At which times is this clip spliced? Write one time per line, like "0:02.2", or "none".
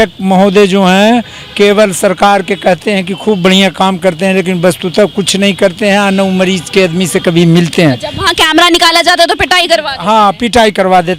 none